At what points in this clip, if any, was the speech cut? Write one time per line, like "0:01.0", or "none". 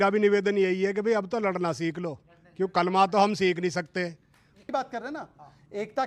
0:04.6